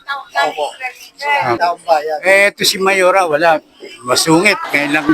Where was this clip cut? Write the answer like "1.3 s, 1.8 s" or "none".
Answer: 1.6 s